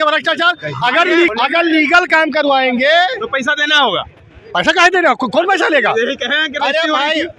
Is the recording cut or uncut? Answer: uncut